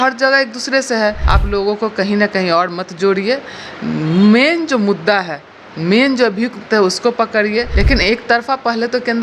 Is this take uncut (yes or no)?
no